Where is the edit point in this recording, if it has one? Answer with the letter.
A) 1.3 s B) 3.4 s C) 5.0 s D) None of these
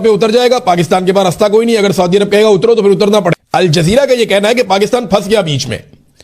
B